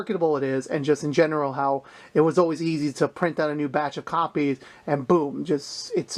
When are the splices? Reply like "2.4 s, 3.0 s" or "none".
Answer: none